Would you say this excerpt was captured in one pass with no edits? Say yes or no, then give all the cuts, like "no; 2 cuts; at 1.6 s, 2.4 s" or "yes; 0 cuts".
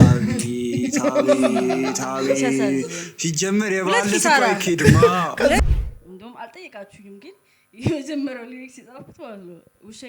no; 1 cut; at 5.6 s